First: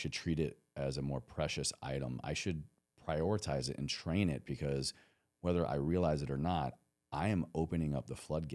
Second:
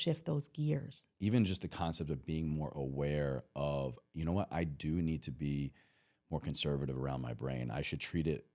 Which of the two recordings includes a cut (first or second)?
second